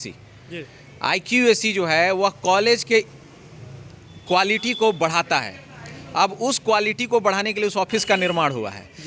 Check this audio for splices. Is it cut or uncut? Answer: uncut